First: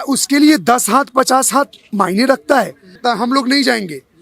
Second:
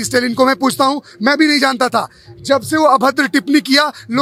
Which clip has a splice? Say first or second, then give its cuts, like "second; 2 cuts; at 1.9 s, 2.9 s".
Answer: first; 1 cut; at 3.0 s